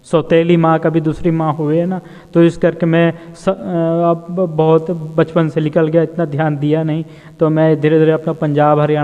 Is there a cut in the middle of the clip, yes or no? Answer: no